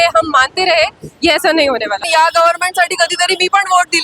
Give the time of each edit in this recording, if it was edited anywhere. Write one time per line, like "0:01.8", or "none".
0:02.0